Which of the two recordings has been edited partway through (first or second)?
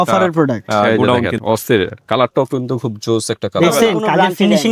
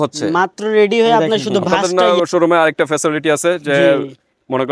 second